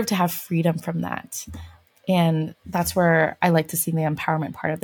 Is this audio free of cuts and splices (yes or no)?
yes